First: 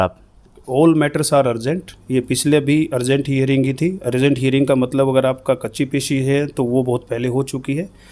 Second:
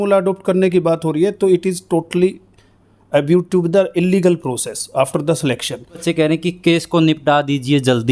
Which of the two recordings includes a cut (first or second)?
second